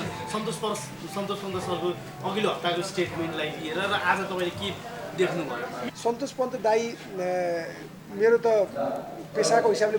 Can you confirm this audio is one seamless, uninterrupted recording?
no; 1 cut; at 5.8 s

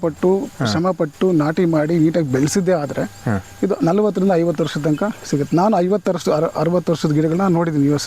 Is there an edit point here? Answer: no; 0 cuts

